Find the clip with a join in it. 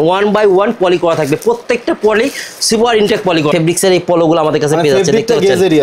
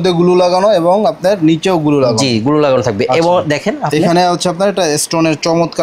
first; 1 cut; at 3.5 s

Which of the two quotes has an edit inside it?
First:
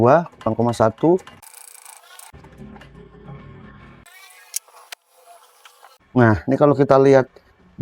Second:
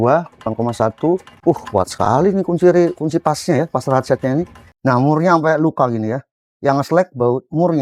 second; 2 cuts; at 1.3 s, 4.6 s

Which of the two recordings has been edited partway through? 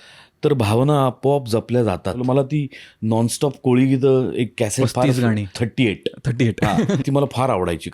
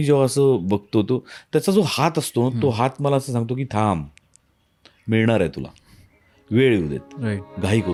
first; 3 cuts; at 2.2 s, 5.6 s, 7.0 s

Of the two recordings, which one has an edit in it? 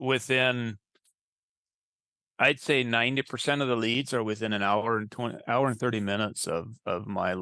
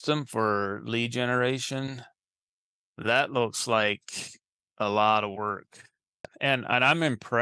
second; 1 cut; at 6.3 s

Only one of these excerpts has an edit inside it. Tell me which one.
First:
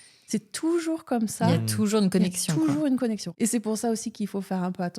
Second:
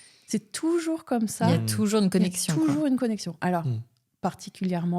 first; 1 cut; at 3.3 s

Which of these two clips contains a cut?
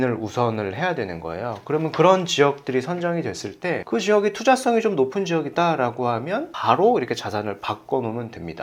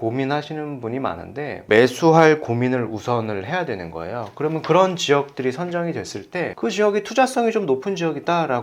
second; 1 cut; at 1.6 s

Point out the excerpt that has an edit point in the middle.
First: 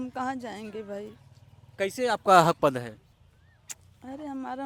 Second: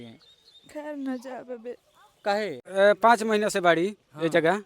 second; 1 cut; at 2.6 s

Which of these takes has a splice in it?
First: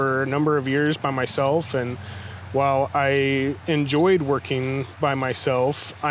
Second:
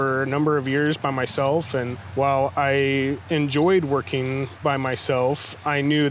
second; 1 cut; at 2.0 s

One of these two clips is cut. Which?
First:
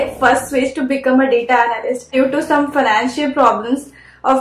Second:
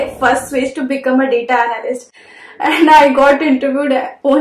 first; 1 cut; at 2.1 s

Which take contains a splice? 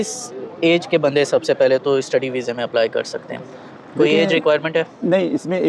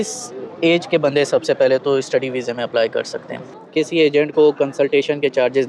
second; 1 cut; at 3.6 s

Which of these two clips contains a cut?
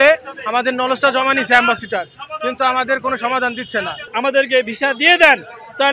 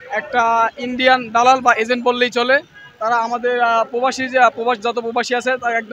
first; 1 cut; at 4.0 s

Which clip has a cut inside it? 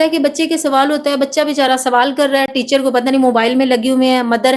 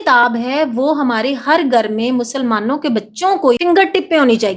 second; 1 cut; at 3.6 s

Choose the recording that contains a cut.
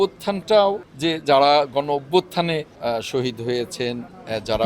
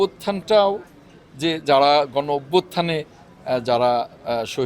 first; 2 cuts; at 0.9 s, 2.7 s

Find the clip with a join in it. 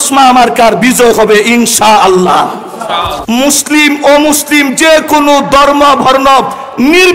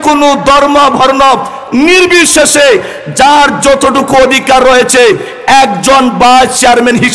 first; 1 cut; at 3.1 s

